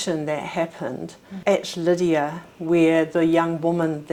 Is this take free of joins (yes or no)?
yes